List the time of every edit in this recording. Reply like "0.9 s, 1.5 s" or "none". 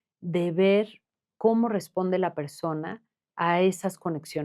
1.1 s